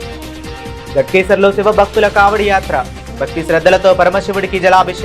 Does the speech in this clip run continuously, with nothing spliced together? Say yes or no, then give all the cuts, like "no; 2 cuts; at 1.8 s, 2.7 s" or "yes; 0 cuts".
no; 1 cut; at 0.9 s